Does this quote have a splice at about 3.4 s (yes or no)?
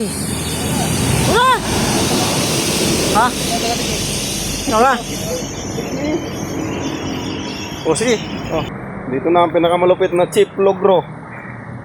no